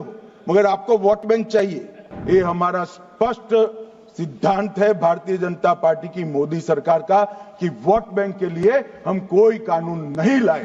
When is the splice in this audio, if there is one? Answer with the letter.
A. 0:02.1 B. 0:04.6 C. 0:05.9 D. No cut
A